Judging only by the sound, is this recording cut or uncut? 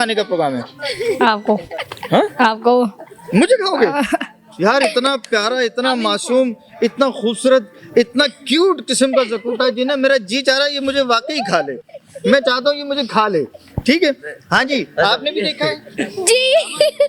uncut